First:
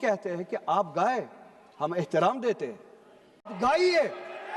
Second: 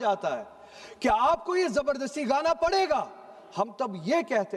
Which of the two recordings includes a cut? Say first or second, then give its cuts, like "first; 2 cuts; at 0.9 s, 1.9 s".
first; 1 cut; at 3.5 s